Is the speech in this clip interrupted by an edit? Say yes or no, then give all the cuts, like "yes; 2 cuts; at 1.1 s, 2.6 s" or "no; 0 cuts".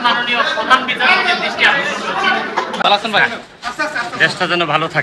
yes; 1 cut; at 2.8 s